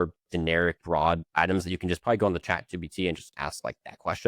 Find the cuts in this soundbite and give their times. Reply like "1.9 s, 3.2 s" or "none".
1.1 s